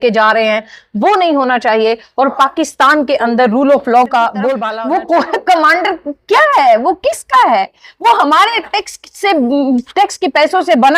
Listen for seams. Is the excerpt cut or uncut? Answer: cut